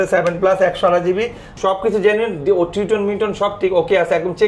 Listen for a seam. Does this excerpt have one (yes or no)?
yes